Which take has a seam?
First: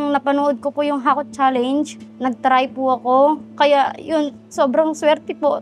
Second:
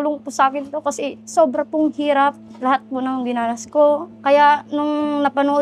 second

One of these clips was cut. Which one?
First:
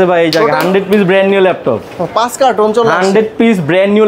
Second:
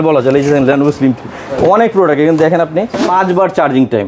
second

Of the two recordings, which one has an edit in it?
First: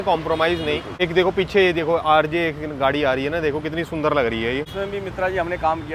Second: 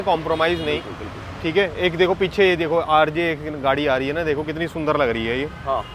first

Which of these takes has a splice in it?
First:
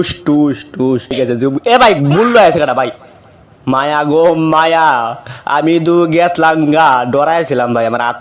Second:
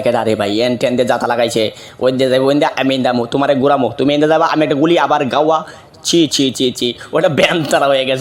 first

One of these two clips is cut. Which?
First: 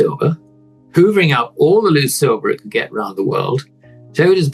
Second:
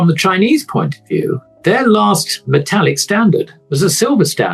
second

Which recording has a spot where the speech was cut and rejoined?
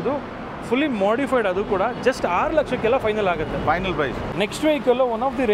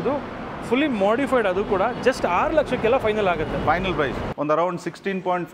second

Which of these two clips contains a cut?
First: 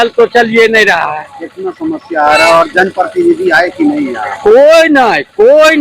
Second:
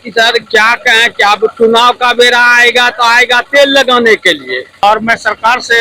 second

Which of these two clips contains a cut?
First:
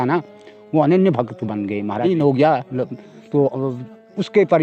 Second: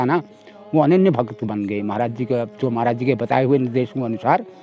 first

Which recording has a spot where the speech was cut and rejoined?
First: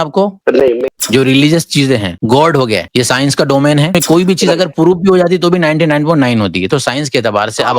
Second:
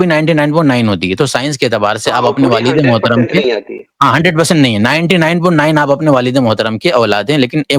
first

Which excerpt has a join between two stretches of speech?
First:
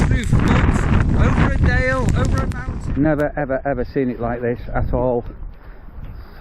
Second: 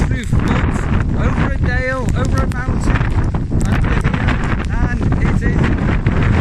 first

